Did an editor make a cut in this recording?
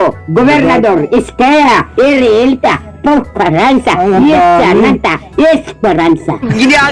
no; 0 cuts

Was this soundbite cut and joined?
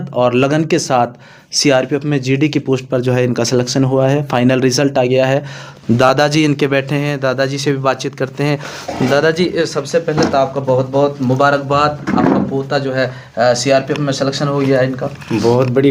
no; 0 cuts

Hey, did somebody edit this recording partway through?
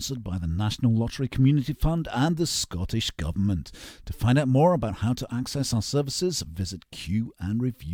no; 0 cuts

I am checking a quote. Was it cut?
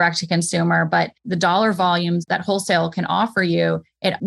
yes; 2 cuts; at 1.3 s, 2.2 s

